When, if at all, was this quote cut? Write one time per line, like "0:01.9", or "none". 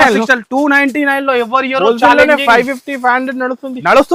none